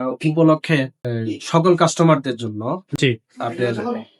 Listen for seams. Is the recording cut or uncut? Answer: uncut